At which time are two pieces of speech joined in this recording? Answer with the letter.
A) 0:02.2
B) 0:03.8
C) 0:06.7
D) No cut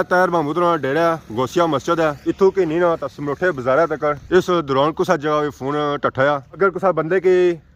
D